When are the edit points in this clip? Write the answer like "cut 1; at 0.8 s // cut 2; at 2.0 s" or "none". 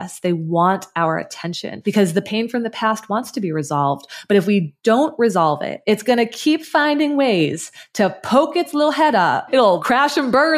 cut 1; at 1.6 s // cut 2; at 5.7 s // cut 3; at 9.5 s